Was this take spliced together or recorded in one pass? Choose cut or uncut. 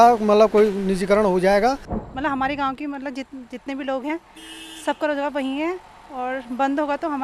cut